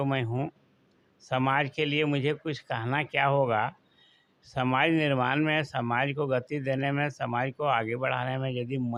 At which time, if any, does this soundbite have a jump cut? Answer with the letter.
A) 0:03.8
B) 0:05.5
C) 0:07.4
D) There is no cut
D